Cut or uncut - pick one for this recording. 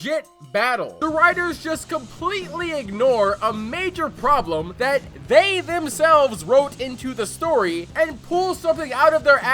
cut